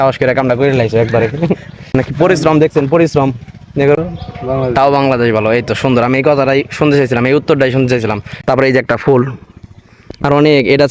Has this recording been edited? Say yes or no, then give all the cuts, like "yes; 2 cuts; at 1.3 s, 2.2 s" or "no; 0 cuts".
yes; 3 cuts; at 1.9 s, 4.0 s, 8.3 s